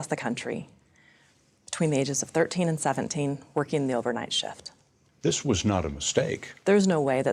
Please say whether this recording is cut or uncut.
uncut